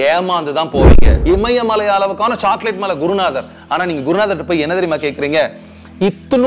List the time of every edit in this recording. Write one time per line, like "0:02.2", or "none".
0:01.1